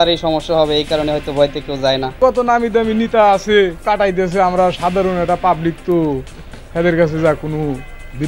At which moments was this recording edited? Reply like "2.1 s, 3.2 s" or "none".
2.2 s, 3.8 s